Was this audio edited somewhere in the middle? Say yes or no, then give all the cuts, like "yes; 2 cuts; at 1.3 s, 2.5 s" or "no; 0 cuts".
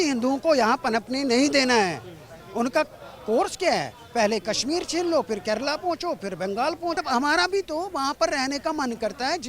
yes; 1 cut; at 7.0 s